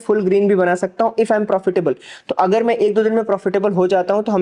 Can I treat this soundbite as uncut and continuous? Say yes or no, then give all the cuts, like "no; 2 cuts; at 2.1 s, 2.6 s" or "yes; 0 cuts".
yes; 0 cuts